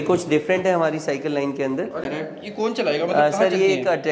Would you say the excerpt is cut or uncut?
cut